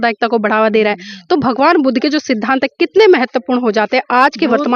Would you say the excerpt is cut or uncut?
uncut